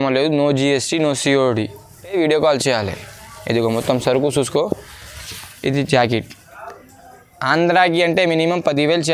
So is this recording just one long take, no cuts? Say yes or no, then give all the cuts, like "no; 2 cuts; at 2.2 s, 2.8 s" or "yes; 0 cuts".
yes; 0 cuts